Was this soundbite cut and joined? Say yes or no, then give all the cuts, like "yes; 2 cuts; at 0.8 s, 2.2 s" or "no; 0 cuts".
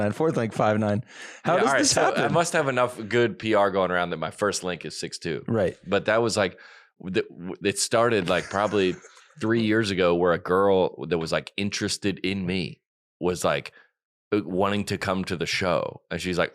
no; 0 cuts